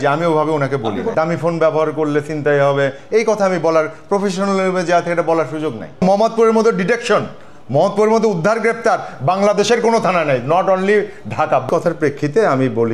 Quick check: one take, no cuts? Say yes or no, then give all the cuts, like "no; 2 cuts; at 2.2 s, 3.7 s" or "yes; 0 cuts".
no; 3 cuts; at 1.0 s, 6.0 s, 11.7 s